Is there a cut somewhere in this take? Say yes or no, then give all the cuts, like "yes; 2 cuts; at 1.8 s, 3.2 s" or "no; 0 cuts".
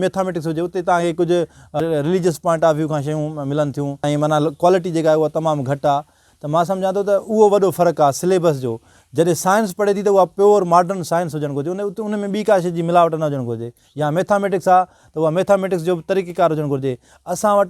yes; 2 cuts; at 1.8 s, 4.0 s